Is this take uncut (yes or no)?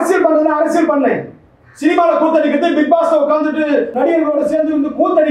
no